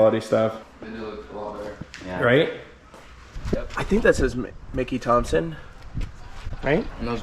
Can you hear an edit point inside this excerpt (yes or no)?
yes